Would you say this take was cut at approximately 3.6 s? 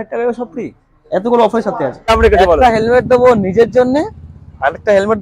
no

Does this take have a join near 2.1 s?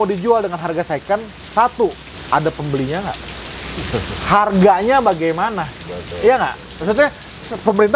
yes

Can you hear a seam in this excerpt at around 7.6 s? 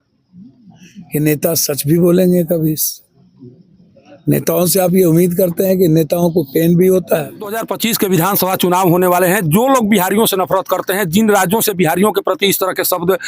yes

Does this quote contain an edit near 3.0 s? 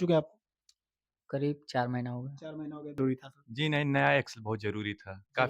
yes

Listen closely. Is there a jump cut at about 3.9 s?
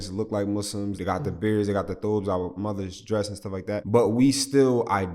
yes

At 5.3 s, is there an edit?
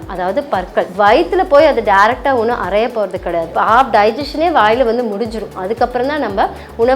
no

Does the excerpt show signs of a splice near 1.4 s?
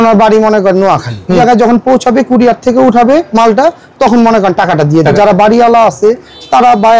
yes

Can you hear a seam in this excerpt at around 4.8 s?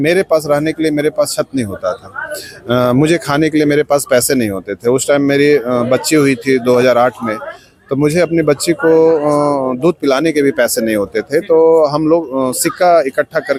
no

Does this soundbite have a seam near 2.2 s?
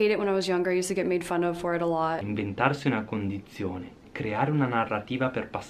yes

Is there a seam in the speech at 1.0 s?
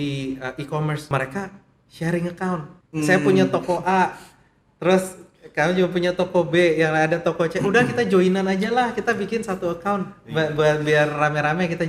yes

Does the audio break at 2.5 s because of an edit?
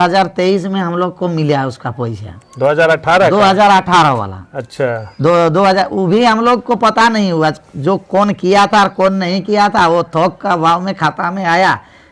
no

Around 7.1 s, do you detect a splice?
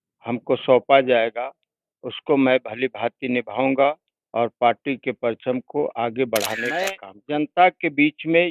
yes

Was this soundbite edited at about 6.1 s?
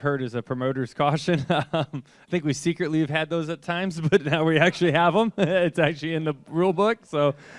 no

